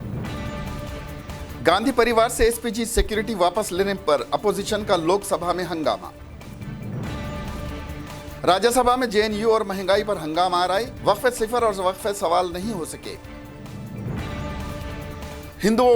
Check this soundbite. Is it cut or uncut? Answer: cut